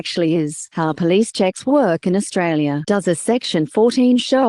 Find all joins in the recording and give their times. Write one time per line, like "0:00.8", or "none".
none